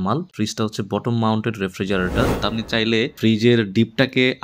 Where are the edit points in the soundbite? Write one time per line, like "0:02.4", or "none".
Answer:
0:02.4